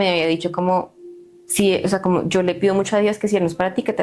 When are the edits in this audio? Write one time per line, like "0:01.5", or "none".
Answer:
none